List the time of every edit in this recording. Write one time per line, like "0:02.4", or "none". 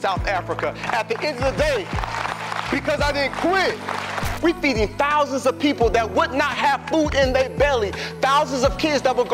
0:04.3